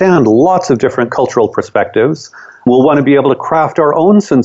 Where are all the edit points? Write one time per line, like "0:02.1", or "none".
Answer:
0:02.7